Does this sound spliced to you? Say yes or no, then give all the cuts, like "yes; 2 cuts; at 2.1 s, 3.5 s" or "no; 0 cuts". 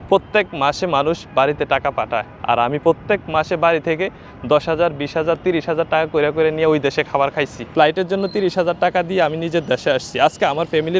yes; 1 cut; at 7.7 s